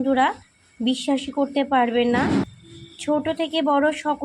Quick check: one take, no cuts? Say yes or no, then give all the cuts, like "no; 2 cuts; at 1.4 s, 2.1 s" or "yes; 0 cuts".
no; 1 cut; at 2.4 s